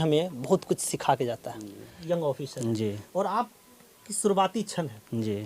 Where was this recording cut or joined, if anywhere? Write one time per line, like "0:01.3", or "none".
0:02.0